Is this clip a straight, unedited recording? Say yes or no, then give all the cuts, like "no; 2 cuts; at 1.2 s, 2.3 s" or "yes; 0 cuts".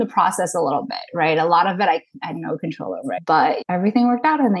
no; 1 cut; at 3.2 s